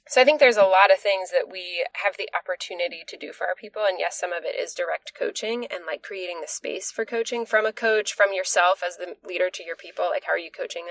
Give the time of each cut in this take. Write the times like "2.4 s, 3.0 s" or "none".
1.9 s

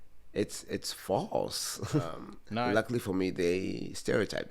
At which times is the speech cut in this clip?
2.7 s

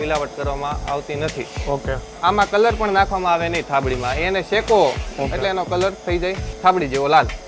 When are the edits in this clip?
2.1 s, 5.1 s, 6.5 s

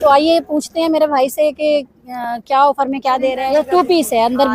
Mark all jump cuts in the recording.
3.4 s

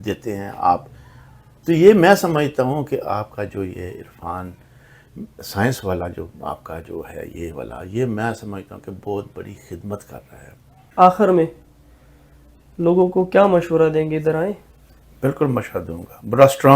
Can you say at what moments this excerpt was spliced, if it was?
10.8 s

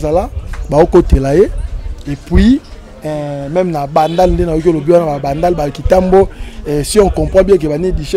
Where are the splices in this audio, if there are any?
none

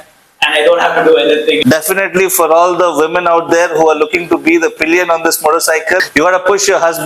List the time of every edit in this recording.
1.6 s

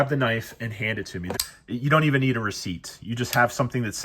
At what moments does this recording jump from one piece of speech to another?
1.3 s

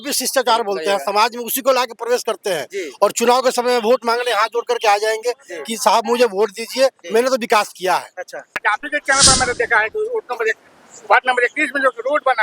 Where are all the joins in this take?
8.6 s

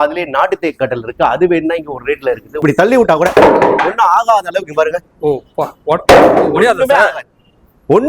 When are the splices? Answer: 2.6 s

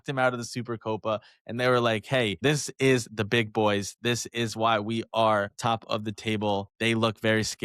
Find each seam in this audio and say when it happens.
2.3 s, 6.6 s

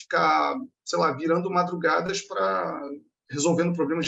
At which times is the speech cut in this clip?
3.1 s

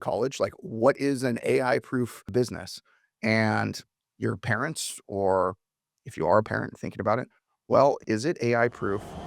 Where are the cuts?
2.3 s, 8.0 s

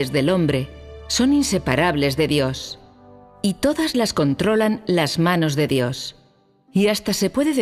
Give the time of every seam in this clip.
none

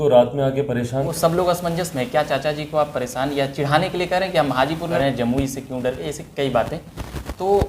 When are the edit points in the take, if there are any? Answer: 1.1 s, 4.9 s

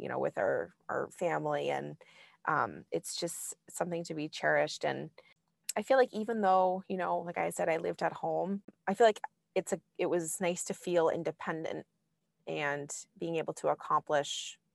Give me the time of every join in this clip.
none

